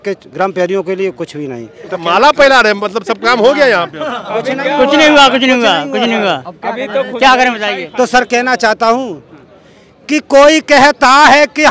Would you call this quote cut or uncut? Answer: uncut